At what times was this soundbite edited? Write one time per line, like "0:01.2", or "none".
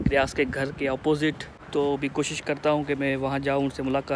0:01.5